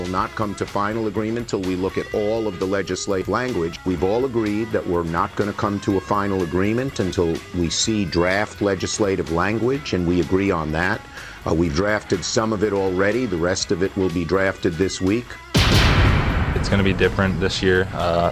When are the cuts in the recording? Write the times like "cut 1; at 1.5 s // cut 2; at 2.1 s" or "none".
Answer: cut 1; at 3.2 s